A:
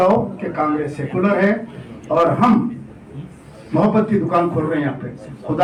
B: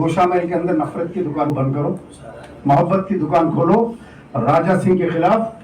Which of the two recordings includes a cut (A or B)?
B